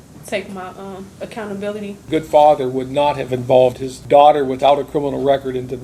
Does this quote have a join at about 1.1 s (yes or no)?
yes